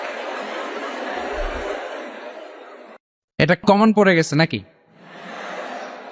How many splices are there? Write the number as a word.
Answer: one